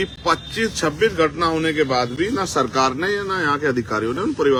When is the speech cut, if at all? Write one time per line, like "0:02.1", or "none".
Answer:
none